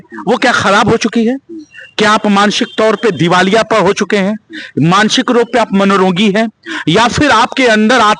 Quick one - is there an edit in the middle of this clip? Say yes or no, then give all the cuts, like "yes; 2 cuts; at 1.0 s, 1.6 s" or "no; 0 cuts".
no; 0 cuts